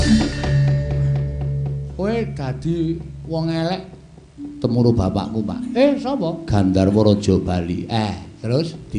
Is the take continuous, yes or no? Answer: yes